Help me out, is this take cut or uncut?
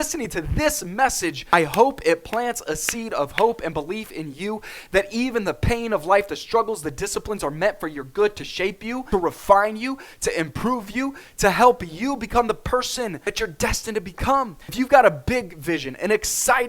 cut